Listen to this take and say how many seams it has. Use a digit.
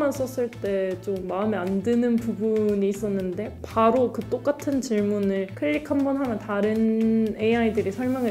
1